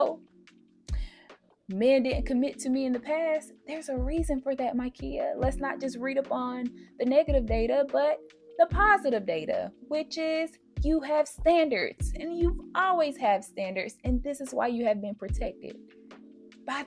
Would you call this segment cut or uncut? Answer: uncut